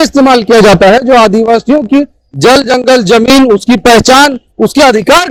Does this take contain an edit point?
no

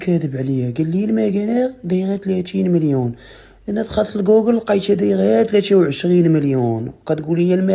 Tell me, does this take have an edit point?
no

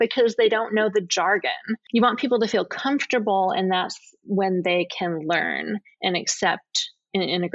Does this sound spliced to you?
yes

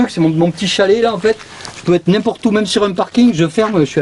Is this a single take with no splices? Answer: yes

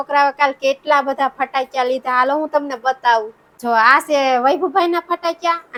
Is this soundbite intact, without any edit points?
yes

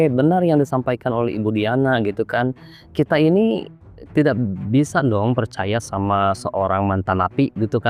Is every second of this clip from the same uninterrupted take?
yes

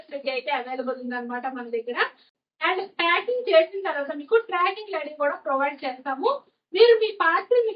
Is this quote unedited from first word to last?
no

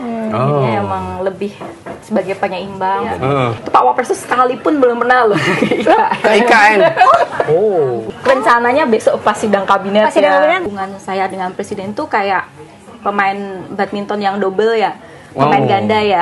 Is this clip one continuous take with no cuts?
no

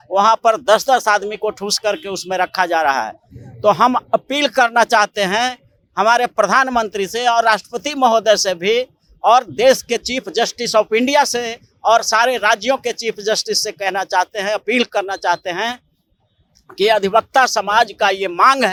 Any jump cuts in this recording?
no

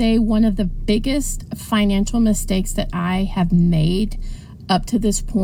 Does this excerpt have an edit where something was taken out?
no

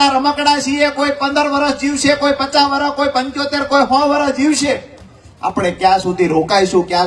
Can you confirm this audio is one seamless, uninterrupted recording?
yes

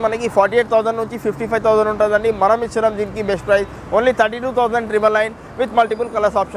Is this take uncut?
yes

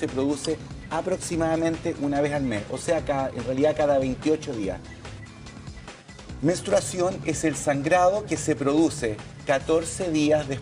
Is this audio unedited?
yes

